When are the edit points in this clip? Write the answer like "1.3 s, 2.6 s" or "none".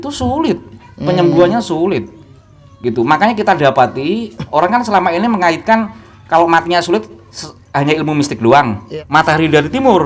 8.9 s